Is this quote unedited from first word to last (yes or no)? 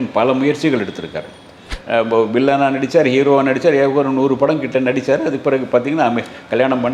no